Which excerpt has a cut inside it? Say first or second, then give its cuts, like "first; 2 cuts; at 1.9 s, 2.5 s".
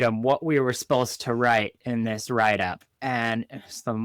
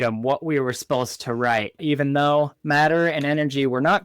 second; 2 cuts; at 1.7 s, 2.6 s